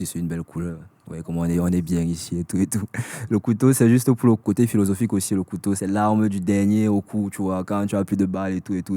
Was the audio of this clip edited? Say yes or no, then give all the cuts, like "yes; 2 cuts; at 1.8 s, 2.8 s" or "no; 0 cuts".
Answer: yes; 2 cuts; at 4.2 s, 5.8 s